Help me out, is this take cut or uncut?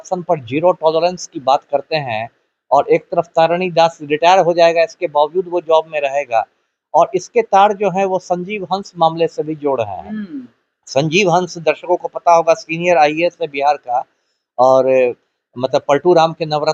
uncut